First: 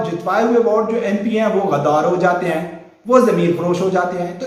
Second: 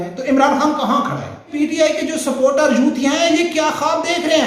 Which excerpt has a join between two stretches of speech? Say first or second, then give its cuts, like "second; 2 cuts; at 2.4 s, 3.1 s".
second; 1 cut; at 1.5 s